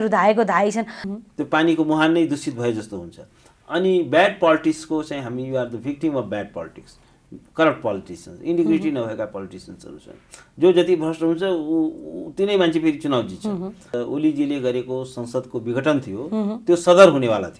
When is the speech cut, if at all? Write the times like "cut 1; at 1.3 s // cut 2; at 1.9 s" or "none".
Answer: cut 1; at 1.0 s // cut 2; at 13.9 s